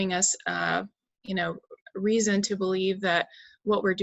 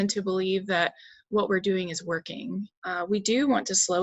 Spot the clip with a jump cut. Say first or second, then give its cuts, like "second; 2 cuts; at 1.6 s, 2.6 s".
second; 1 cut; at 2.7 s